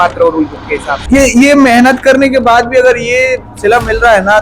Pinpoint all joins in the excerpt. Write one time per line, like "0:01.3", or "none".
0:00.9